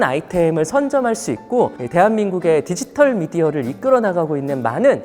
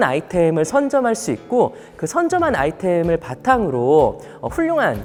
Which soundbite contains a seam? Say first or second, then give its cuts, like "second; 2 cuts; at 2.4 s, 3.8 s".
first; 1 cut; at 1.8 s